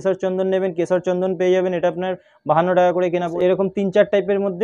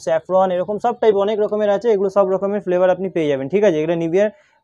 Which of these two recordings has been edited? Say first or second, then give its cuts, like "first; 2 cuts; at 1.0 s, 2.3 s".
first; 1 cut; at 3.3 s